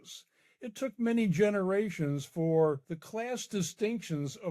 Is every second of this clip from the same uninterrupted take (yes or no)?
no